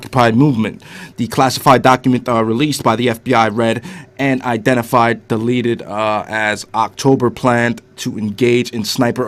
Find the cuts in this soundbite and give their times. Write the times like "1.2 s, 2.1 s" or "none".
5.5 s